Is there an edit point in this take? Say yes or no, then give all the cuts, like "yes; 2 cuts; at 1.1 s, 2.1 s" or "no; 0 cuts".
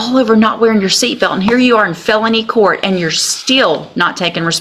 no; 0 cuts